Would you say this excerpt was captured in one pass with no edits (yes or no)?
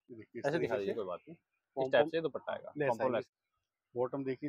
no